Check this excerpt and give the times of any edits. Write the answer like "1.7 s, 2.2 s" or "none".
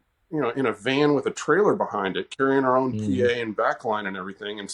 none